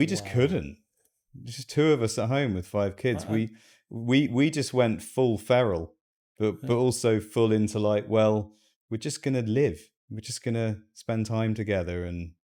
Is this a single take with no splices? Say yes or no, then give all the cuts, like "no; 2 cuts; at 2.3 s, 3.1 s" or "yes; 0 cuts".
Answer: yes; 0 cuts